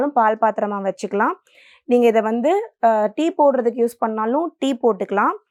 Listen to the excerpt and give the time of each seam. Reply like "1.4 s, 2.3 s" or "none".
none